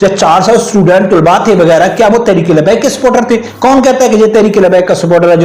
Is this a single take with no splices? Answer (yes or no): no